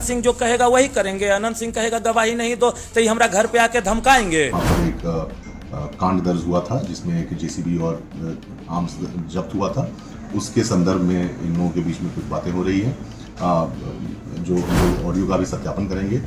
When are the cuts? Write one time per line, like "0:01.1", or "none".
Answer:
0:04.5